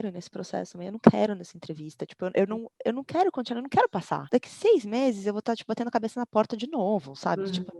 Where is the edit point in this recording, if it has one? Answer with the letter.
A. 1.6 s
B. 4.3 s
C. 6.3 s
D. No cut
B